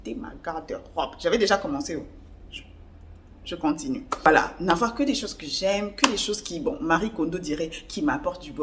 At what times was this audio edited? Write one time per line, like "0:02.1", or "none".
none

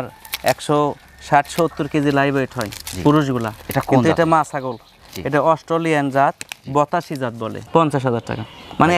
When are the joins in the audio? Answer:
0:07.5

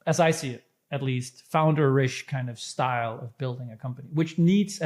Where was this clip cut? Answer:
none

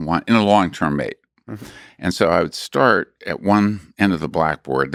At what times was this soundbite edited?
none

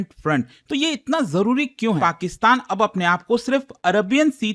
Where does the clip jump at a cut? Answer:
0:02.0

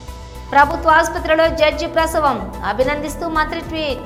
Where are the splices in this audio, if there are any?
none

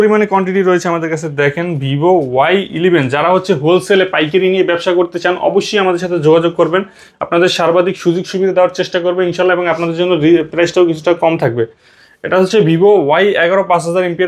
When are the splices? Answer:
none

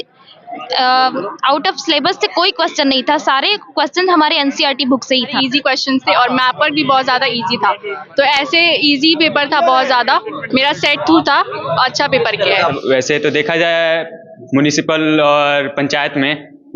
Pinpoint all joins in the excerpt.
0:05.3
0:12.7

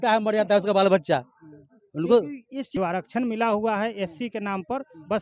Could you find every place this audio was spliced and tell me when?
0:02.6

